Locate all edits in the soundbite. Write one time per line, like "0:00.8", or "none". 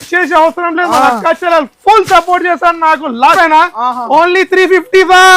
0:03.4